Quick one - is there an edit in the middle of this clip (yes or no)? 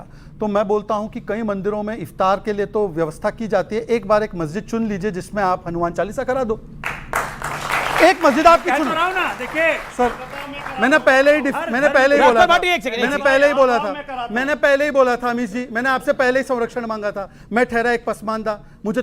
yes